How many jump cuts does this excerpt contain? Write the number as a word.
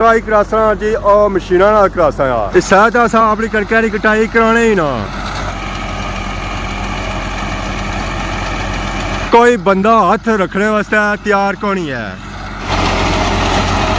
zero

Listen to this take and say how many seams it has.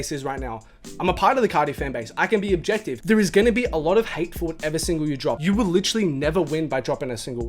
two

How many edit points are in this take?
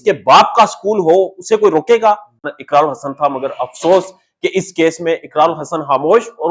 one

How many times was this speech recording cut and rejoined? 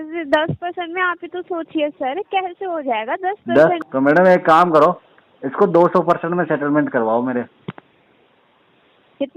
one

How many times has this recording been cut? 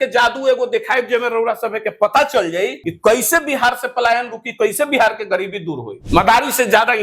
two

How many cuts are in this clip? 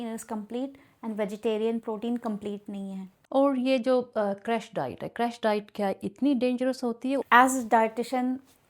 two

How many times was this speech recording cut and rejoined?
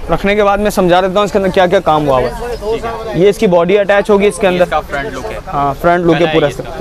zero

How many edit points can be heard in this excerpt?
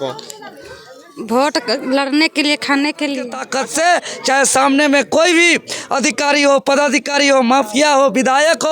one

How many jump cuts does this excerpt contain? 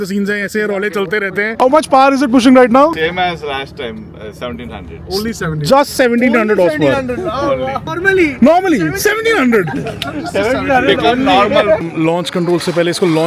three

